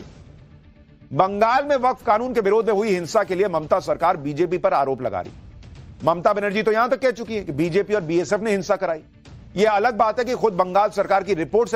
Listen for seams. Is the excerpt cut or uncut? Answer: cut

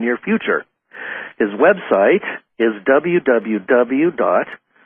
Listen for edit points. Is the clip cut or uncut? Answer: uncut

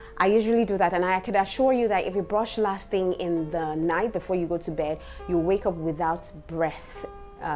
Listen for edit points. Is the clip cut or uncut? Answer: uncut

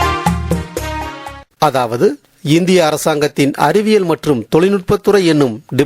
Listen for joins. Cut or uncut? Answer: cut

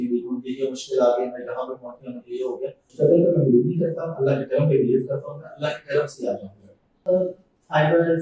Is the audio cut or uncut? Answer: cut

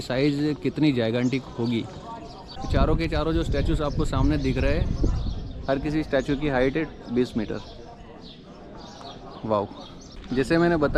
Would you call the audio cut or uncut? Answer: uncut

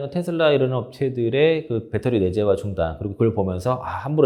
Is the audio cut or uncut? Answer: uncut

